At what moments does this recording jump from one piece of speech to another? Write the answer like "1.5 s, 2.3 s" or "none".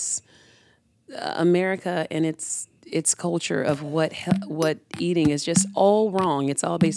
none